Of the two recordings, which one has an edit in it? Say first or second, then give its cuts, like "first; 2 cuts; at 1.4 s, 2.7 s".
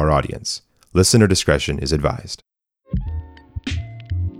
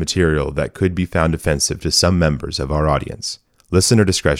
first; 1 cut; at 2.8 s